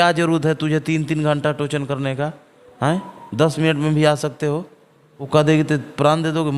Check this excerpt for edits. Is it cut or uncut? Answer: cut